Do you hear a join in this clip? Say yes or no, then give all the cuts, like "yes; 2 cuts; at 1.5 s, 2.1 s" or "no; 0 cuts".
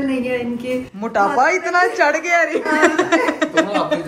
no; 0 cuts